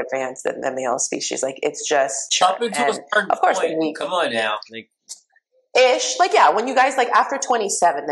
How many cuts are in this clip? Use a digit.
1